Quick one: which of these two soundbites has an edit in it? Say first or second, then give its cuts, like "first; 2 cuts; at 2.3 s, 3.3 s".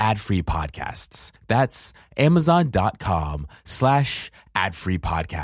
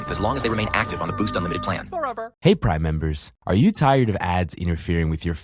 second; 1 cut; at 2.3 s